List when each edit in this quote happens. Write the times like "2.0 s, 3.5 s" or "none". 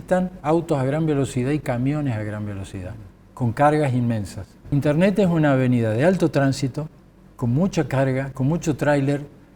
4.7 s